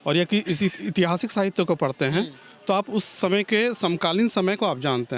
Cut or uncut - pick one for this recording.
uncut